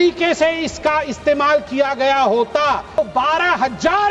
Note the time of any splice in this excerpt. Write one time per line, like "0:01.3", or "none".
0:03.0